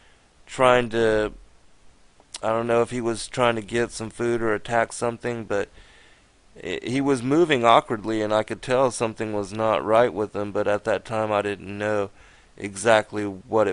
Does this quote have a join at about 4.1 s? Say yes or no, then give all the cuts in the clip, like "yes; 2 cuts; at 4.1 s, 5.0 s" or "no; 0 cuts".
no; 1 cut; at 10.3 s